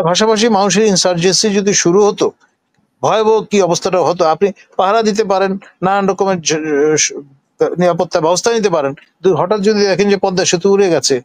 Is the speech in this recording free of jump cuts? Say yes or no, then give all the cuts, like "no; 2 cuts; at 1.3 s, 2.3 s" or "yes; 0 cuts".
yes; 0 cuts